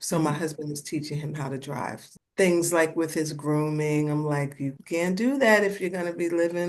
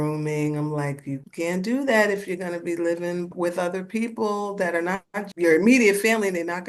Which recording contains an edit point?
first; 1 cut; at 2.0 s

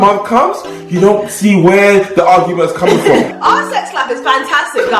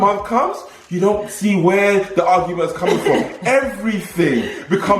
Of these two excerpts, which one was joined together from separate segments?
first; 1 cut; at 3.3 s

